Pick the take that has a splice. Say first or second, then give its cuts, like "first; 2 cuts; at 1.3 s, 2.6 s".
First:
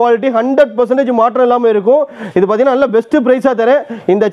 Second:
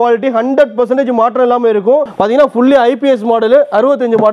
second; 1 cut; at 2.1 s